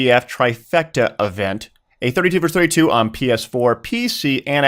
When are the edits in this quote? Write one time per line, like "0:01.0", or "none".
none